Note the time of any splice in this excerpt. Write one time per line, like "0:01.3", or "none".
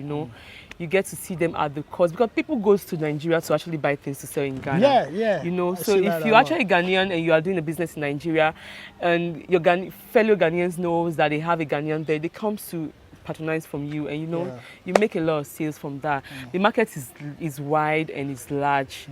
none